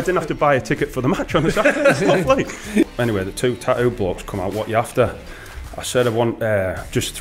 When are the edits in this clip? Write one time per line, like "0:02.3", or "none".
0:02.9